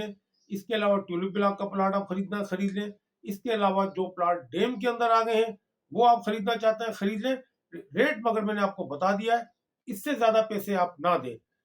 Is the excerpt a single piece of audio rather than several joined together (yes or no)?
yes